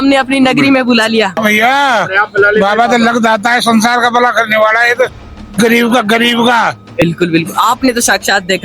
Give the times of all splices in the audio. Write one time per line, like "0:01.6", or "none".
0:01.4
0:07.0